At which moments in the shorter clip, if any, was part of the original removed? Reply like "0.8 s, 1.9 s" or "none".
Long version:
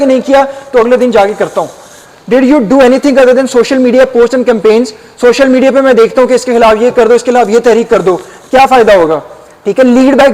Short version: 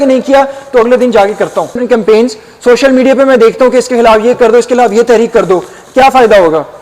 1.8 s